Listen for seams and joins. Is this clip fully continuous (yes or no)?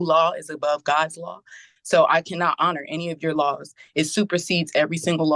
yes